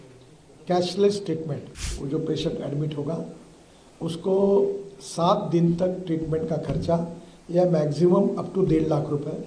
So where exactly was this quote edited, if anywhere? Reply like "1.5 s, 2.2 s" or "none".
1.9 s